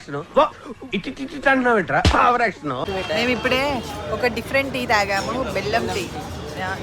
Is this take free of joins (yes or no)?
no